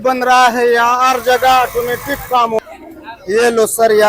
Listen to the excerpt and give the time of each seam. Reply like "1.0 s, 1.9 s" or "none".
2.6 s